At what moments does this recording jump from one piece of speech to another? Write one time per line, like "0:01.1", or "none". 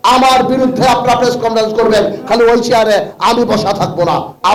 none

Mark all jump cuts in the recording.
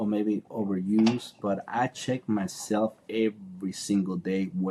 none

